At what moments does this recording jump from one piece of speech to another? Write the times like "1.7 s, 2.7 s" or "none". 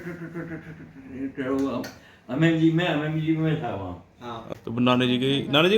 4.5 s